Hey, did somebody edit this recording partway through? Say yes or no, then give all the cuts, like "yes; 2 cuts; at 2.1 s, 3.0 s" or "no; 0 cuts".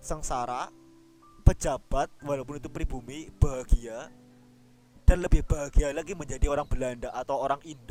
no; 0 cuts